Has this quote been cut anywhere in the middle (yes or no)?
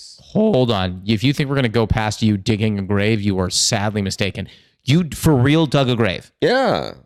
no